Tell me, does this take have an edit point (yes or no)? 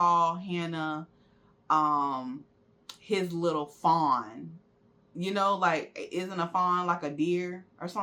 no